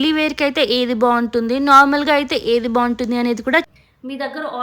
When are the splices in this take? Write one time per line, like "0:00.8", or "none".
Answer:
0:03.7